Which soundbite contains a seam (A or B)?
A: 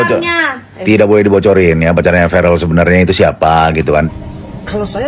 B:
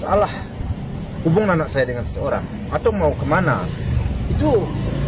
A